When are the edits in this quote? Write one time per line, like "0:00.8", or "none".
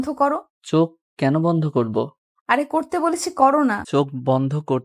0:03.8